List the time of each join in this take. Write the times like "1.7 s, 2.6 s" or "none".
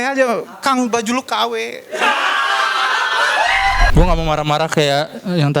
3.9 s